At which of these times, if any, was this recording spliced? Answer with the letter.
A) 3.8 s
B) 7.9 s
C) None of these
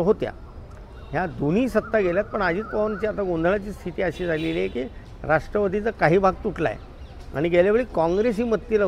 C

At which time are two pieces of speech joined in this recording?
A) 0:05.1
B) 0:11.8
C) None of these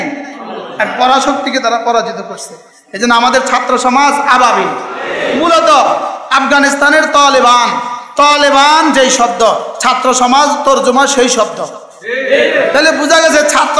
A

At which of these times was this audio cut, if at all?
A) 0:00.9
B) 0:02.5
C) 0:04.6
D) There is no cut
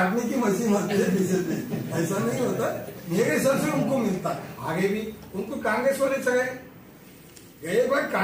C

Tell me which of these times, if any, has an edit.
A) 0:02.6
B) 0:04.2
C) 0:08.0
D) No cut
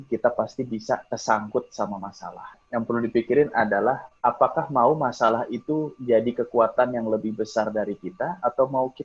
A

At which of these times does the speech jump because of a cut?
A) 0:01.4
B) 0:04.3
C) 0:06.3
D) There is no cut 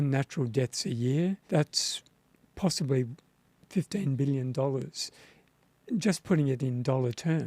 A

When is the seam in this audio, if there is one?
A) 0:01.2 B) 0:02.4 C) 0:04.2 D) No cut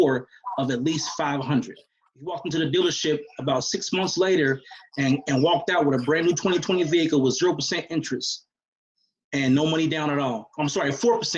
B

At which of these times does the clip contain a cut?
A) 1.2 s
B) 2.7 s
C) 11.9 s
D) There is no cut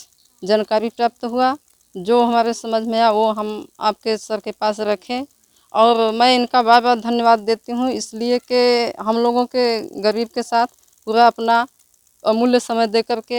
D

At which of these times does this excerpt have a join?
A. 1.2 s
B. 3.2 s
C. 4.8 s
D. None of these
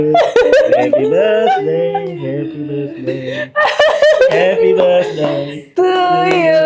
D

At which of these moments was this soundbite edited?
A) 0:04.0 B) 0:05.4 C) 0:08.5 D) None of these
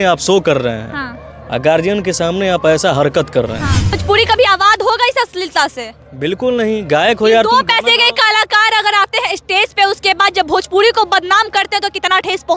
A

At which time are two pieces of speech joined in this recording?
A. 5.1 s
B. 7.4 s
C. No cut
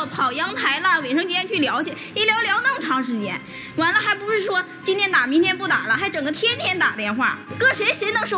B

